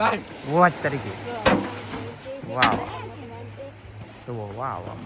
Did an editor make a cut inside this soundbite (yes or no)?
no